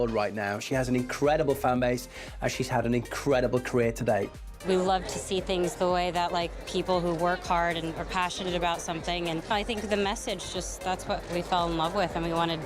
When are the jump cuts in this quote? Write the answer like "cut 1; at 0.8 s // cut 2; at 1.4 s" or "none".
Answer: cut 1; at 4.5 s // cut 2; at 9.5 s